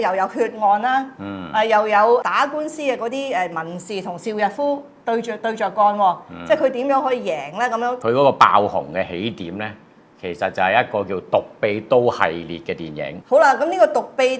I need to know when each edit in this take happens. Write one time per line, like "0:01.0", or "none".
0:02.2
0:08.0
0:13.1